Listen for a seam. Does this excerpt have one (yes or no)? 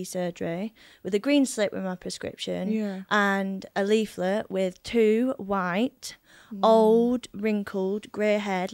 no